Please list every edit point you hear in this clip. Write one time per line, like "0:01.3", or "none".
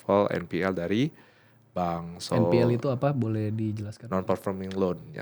none